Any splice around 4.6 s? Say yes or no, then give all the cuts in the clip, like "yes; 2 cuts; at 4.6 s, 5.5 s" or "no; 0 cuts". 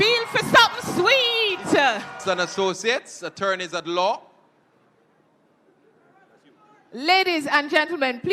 no; 1 cut; at 2.5 s